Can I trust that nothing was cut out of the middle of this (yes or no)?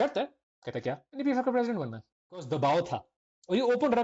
no